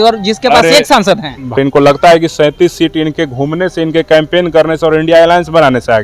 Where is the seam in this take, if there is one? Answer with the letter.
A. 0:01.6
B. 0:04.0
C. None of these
A